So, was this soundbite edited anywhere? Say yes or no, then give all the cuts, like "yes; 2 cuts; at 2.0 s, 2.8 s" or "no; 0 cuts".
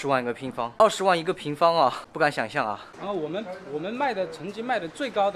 yes; 3 cuts; at 0.7 s, 2.0 s, 2.9 s